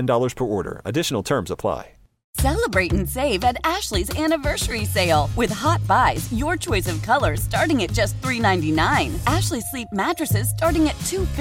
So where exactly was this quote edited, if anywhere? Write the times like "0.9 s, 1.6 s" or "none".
2.3 s